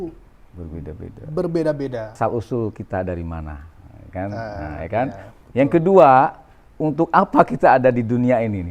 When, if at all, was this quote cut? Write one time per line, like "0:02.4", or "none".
0:02.2